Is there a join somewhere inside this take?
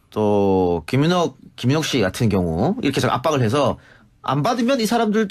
no; 0 cuts

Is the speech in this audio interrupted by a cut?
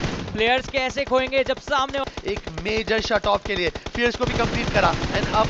yes; 1 cut; at 2.0 s

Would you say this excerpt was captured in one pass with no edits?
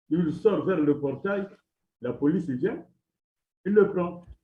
yes; 0 cuts

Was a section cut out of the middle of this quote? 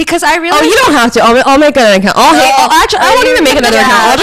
no; 0 cuts

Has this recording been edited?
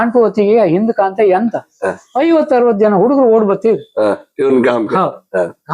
no; 0 cuts

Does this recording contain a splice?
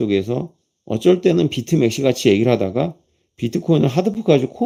no; 0 cuts

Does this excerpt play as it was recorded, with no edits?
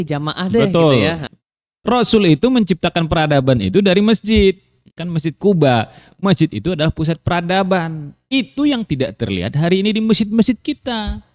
no; 2 cuts; at 1.3 s, 4.9 s

